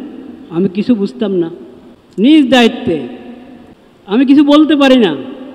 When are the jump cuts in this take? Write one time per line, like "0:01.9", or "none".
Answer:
0:02.2
0:04.3